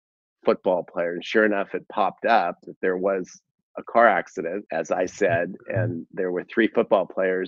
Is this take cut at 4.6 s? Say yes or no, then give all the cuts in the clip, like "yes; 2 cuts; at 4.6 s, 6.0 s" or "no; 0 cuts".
yes; 1 cut; at 4.6 s